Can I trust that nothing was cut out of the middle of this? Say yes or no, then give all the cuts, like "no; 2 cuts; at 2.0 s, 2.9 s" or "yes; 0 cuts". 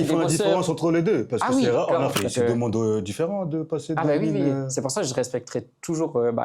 no; 1 cut; at 2.2 s